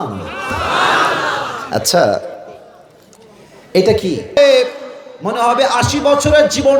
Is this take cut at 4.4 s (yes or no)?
yes